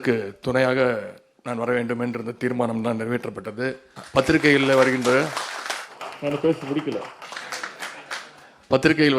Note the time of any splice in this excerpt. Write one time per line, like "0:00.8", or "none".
0:03.9